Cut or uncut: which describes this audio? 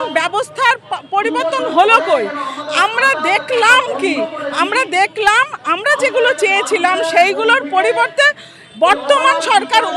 uncut